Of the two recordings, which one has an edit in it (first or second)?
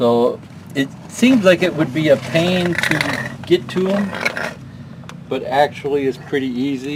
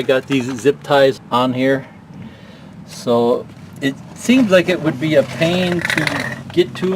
second